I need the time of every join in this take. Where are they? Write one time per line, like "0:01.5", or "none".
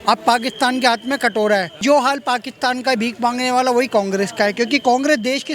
0:01.8